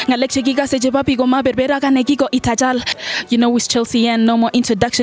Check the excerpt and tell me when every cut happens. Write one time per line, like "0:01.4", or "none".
0:03.0

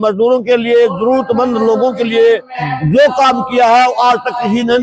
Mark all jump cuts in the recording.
none

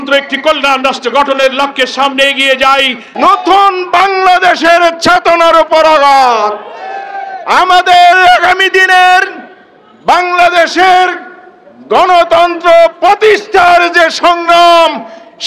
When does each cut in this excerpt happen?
0:03.0

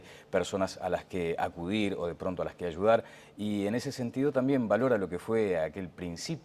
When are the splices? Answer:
0:01.9

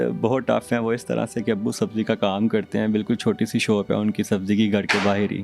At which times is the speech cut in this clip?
none

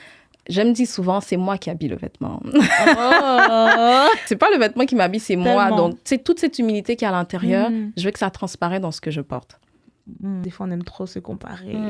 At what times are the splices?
0:04.3
0:10.4

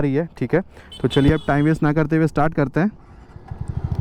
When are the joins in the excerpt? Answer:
none

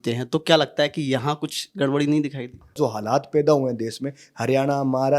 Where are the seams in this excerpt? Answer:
0:02.8

